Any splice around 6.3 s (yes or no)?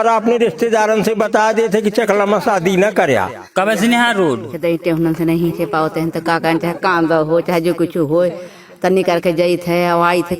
no